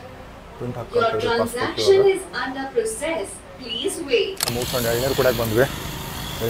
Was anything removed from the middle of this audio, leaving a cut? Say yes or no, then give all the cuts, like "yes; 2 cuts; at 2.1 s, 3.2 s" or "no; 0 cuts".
yes; 1 cut; at 4.4 s